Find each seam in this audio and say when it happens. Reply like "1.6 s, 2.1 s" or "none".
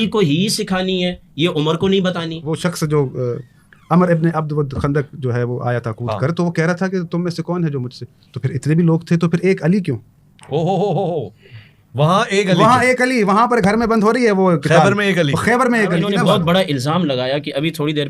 2.1 s, 16.1 s